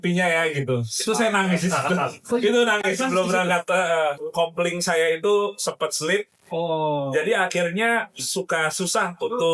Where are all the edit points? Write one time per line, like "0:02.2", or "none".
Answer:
0:04.2